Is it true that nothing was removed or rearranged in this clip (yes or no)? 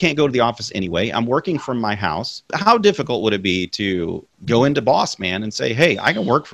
no